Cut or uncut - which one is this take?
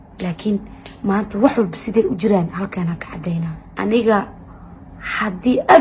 cut